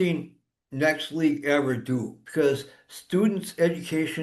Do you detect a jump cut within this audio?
yes; 1 cut; at 2.2 s

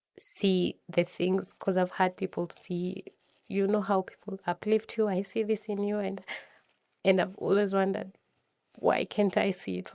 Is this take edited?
no; 0 cuts

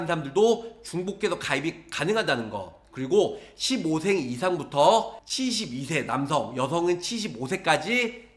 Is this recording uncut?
yes; 0 cuts

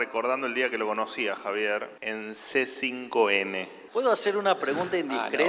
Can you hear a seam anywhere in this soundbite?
yes; 2 cuts; at 2.0 s, 3.7 s

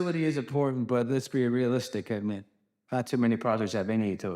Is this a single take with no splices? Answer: yes; 0 cuts

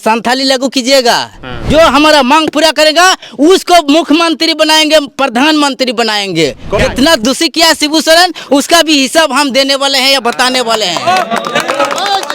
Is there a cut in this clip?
yes; 2 cuts; at 1.6 s, 6.8 s

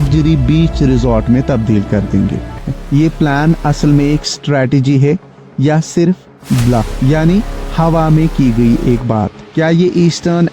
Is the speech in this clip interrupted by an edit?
yes; 1 cut; at 2.7 s

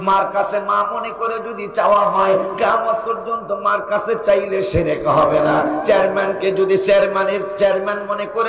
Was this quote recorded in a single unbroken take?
yes; 0 cuts

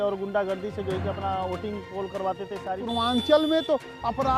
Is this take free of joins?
no; 1 cut; at 2.8 s

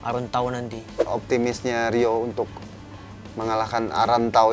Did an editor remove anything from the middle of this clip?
yes; 1 cut; at 1.0 s

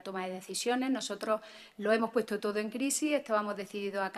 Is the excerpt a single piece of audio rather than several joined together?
no; 1 cut; at 2.3 s

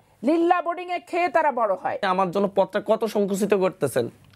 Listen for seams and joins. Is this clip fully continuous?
no; 1 cut; at 2.0 s

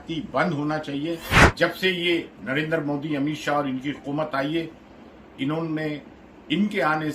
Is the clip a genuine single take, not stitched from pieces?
no; 1 cut; at 1.3 s

